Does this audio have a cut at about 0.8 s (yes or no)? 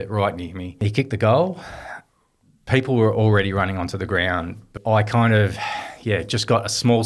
yes